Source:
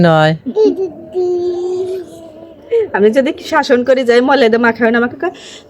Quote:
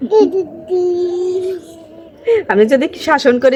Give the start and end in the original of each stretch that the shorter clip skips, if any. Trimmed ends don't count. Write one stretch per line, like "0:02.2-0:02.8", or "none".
none